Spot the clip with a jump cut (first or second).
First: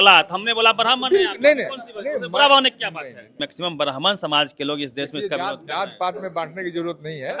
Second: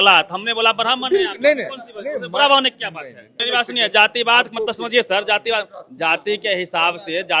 first